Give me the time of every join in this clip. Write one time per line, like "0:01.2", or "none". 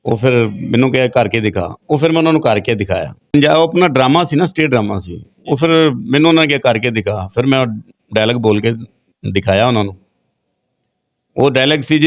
0:03.2